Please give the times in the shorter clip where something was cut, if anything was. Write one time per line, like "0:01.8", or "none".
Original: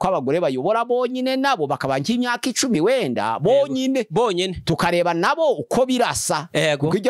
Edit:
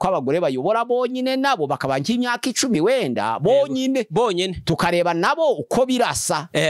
none